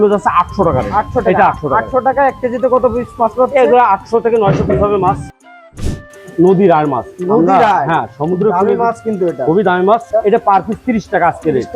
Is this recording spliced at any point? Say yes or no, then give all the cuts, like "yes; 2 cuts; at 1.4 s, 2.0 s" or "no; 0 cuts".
yes; 2 cuts; at 5.7 s, 10.1 s